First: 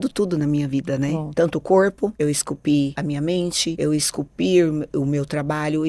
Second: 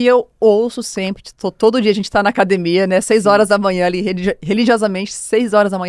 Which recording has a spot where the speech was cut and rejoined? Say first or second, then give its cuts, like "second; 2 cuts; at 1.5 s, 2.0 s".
first; 3 cuts; at 1.3 s, 2.1 s, 3.2 s